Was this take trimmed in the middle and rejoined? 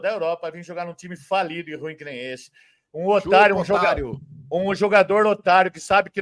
no; 0 cuts

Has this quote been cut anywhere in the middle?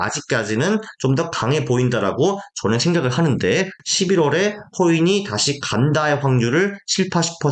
yes; 1 cut; at 3.8 s

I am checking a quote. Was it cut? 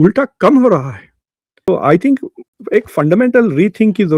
yes; 1 cut; at 1.7 s

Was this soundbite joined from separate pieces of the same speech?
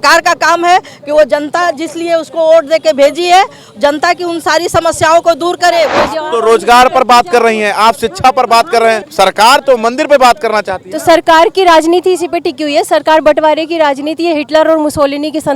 yes; 2 cuts; at 6.1 s, 9.1 s

